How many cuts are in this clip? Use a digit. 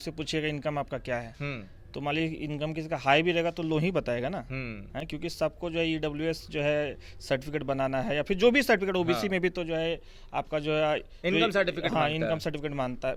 0